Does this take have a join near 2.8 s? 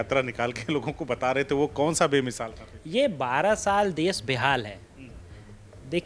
no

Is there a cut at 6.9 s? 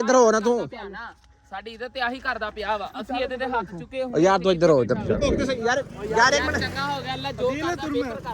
no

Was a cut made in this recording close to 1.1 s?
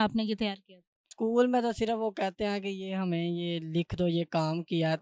yes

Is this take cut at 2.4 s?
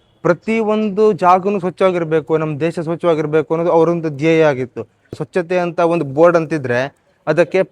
no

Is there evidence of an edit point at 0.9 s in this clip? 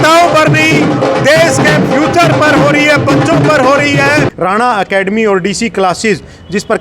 no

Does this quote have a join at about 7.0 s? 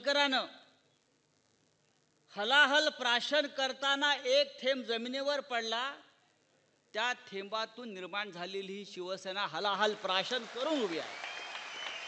no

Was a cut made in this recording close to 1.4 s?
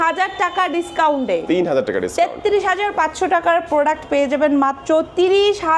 no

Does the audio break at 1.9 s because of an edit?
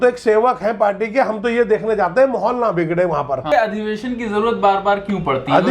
no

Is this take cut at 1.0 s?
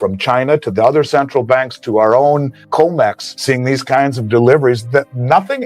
no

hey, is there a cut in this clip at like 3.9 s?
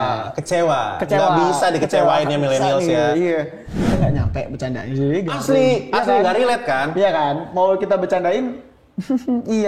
yes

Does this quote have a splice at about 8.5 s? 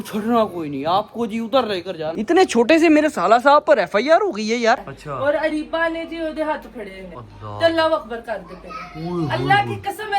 no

